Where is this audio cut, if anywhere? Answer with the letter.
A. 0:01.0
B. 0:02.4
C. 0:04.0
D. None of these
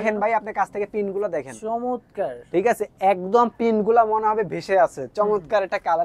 D